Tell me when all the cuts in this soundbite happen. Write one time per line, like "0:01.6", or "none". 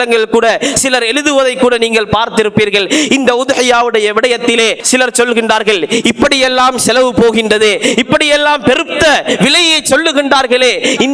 0:04.8